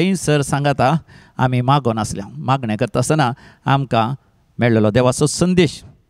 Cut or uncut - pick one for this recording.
uncut